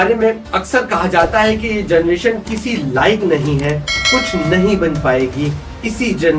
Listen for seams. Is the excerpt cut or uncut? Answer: uncut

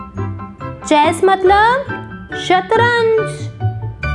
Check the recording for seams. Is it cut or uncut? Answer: cut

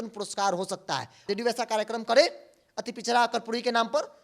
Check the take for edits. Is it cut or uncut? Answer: cut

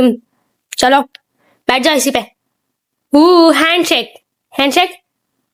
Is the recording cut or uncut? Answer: uncut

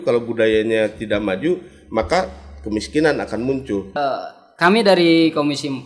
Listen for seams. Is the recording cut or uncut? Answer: cut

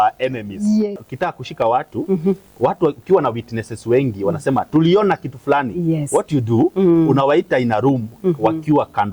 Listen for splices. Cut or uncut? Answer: cut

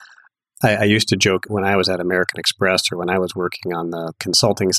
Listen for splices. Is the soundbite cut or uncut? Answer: cut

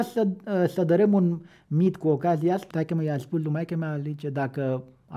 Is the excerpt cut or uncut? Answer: cut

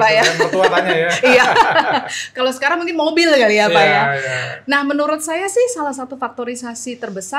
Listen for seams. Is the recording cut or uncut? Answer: uncut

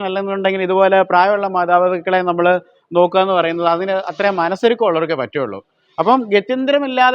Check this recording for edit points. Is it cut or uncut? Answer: uncut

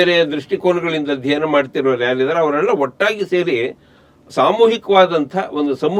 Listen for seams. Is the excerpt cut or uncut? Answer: uncut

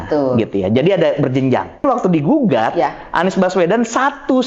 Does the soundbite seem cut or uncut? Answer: cut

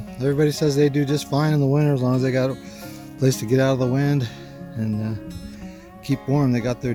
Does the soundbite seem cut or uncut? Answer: uncut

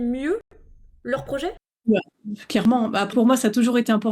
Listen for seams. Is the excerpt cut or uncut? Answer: cut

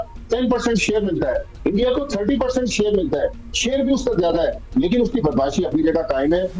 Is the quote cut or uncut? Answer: uncut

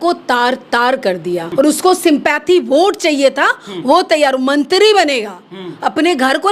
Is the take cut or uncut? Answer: cut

